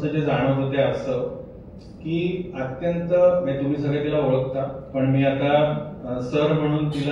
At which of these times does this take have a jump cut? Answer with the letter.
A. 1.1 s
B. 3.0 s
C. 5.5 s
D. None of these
D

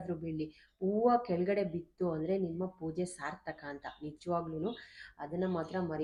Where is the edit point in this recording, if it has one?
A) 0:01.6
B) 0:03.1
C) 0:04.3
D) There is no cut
D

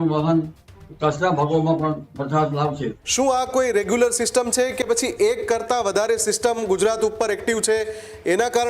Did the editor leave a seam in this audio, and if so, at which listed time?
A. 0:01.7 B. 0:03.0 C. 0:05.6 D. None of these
B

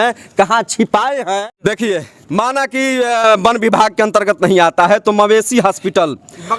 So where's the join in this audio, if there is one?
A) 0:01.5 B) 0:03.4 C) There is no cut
A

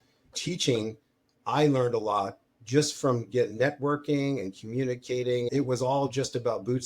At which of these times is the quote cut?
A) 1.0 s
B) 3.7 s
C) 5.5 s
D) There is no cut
C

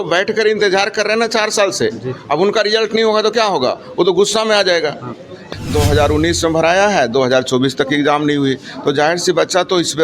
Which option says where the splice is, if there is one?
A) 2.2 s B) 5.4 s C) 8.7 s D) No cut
B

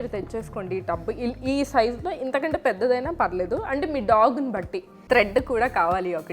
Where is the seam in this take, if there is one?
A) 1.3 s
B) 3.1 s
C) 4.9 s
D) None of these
C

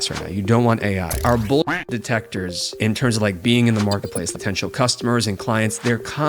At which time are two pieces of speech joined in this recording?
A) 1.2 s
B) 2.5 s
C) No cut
A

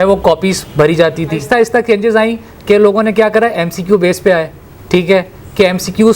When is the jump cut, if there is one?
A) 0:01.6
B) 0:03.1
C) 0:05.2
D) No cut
A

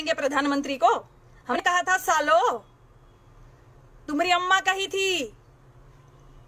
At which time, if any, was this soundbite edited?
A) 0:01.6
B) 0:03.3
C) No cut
A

